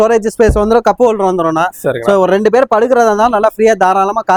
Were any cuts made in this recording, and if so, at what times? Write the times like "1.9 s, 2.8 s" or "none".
none